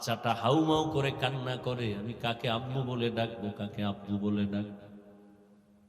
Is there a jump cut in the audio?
no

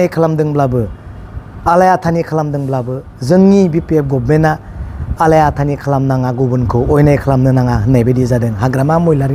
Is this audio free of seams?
yes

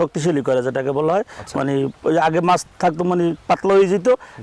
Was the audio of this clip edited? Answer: no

